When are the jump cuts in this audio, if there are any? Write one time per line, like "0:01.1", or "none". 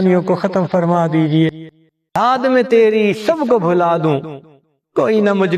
0:02.1